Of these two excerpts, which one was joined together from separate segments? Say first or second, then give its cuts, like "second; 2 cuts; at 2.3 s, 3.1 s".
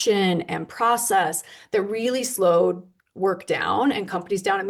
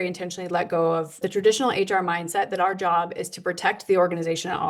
second; 1 cut; at 1.3 s